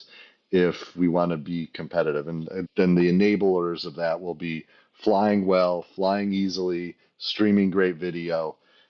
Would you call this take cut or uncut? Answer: cut